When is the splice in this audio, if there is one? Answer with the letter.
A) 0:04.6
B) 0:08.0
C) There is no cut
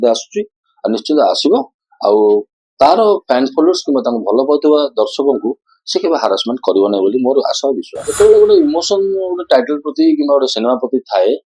B